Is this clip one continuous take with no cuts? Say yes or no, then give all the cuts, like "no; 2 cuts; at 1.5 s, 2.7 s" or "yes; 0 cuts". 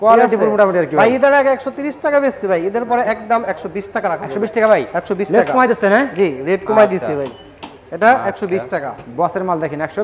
yes; 0 cuts